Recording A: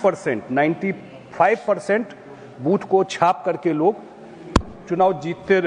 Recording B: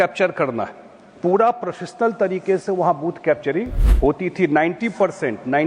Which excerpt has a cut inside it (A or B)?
B